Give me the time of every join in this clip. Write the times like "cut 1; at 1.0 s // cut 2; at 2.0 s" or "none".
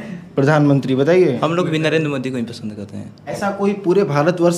cut 1; at 1.4 s // cut 2; at 3.2 s

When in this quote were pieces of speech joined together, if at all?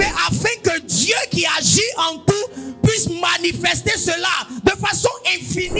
none

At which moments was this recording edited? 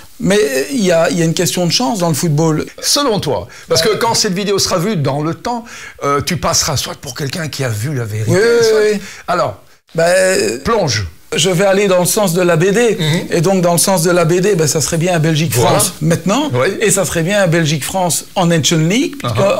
cut 1; at 2.7 s // cut 2; at 11.4 s

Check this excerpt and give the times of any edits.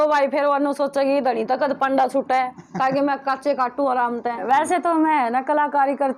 cut 1; at 4.4 s

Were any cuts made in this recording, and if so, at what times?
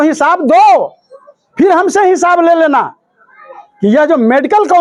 none

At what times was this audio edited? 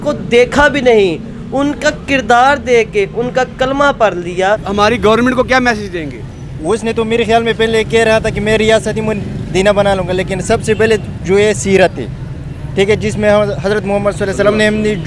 cut 1; at 4.7 s

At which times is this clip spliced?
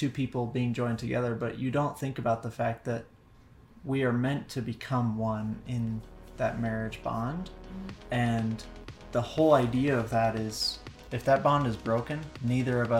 none

